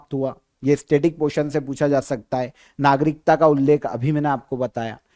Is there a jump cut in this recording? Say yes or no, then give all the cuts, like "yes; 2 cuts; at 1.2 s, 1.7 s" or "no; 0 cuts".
no; 0 cuts